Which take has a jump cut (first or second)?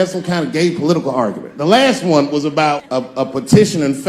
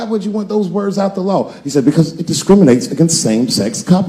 first